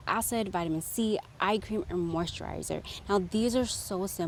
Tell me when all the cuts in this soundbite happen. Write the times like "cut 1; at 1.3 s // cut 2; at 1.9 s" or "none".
none

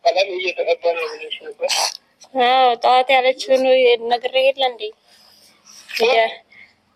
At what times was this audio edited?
none

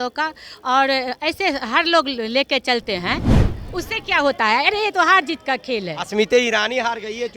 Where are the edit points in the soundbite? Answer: cut 1; at 3.4 s

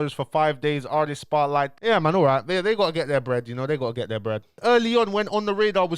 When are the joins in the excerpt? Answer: cut 1; at 1.7 s // cut 2; at 4.5 s

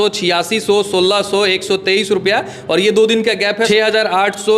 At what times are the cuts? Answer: cut 1; at 3.7 s

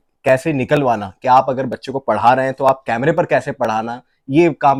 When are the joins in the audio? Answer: none

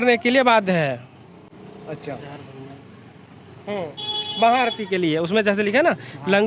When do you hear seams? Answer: none

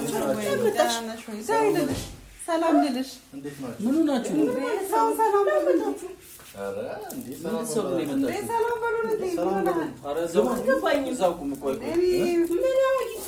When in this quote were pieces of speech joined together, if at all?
none

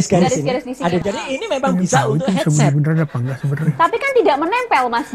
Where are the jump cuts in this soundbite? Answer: cut 1; at 1.0 s

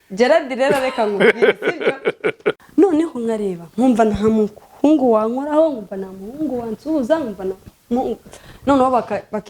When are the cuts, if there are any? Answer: cut 1; at 2.6 s

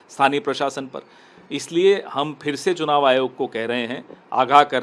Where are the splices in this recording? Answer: none

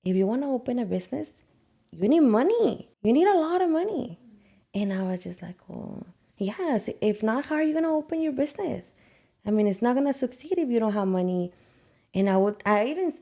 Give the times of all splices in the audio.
cut 1; at 2.9 s

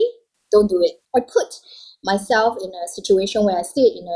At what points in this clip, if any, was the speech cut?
cut 1; at 1.0 s

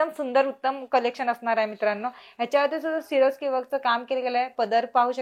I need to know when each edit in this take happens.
none

